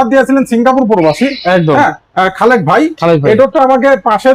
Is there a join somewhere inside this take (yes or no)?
no